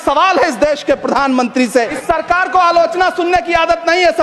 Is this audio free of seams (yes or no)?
no